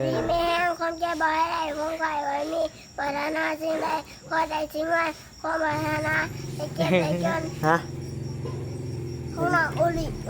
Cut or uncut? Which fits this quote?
cut